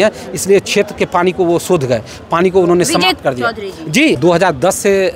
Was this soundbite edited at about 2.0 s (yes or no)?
no